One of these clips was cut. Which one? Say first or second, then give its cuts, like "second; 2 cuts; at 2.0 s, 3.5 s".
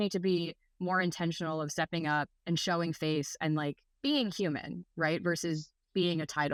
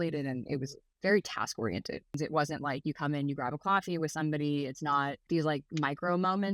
second; 2 cuts; at 2.2 s, 5.2 s